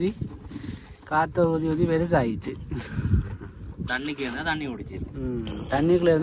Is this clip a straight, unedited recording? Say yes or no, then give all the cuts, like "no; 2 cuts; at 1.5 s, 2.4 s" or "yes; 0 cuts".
yes; 0 cuts